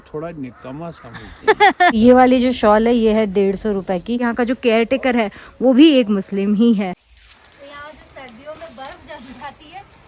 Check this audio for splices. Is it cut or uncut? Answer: cut